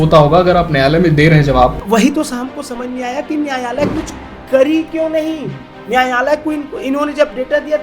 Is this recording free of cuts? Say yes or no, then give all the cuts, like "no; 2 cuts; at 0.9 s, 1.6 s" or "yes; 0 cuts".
no; 1 cut; at 1.8 s